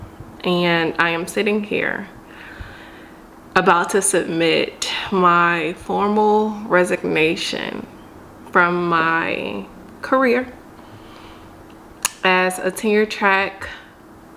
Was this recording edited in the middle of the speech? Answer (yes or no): no